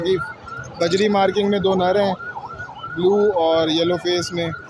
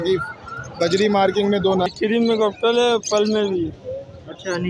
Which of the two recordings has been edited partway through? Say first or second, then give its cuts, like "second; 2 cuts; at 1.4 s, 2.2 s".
second; 1 cut; at 1.9 s